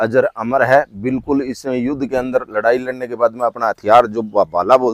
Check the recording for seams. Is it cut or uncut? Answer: uncut